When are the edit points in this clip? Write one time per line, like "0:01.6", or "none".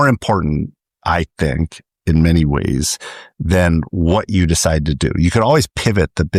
none